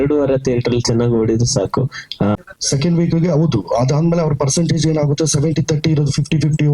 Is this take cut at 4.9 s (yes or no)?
no